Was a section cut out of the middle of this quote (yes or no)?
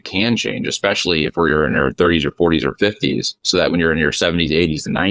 no